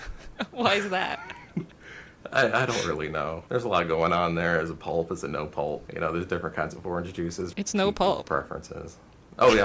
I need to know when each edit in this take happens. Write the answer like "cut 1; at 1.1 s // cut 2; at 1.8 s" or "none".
cut 1; at 3.4 s // cut 2; at 5.9 s // cut 3; at 7.5 s